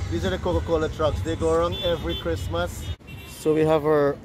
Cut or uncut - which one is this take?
cut